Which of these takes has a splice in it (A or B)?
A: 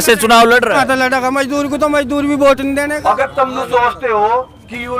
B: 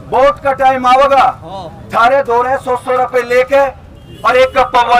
A